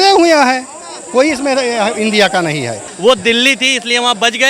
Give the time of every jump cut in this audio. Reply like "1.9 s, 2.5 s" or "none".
2.8 s